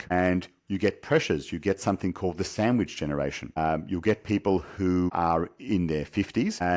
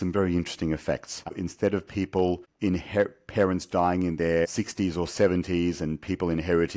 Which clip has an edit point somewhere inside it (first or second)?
second